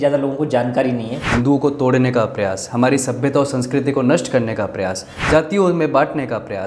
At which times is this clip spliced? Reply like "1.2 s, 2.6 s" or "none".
1.2 s, 5.1 s